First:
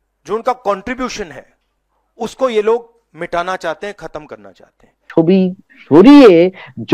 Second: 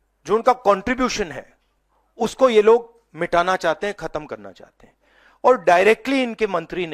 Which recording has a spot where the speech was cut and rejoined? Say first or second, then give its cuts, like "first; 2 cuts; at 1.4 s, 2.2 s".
first; 1 cut; at 5.1 s